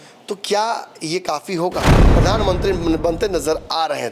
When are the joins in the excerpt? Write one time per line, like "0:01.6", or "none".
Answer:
0:02.0

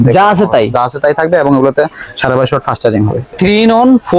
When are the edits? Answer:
0:03.3

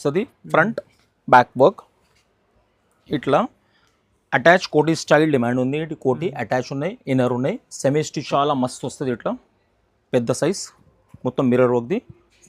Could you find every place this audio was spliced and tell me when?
0:08.3

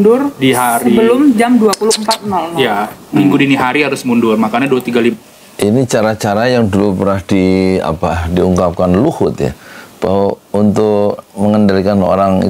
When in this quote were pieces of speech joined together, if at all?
none

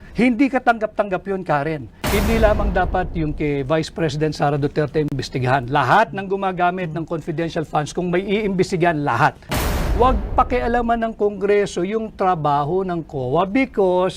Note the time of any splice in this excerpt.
0:01.9
0:09.5

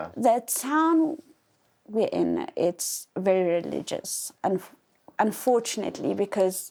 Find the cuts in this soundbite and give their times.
none

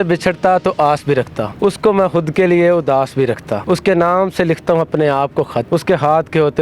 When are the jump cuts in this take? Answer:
0:01.4
0:03.6
0:05.7

